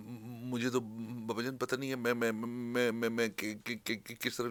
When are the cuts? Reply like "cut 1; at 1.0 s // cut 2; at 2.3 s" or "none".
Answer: none